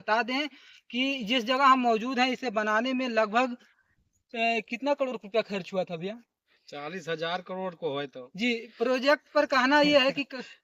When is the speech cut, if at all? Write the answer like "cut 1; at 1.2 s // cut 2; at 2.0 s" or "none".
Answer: none